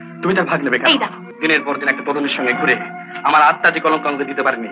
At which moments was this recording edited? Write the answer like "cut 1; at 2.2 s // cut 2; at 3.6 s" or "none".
cut 1; at 1.2 s